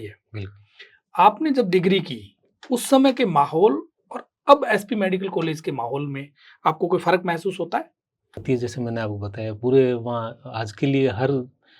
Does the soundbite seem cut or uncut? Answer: cut